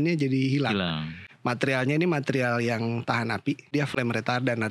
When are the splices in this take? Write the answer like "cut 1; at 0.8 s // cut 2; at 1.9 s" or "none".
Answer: cut 1; at 3.7 s

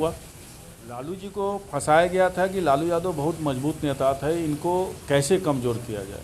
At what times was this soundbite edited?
cut 1; at 1.1 s

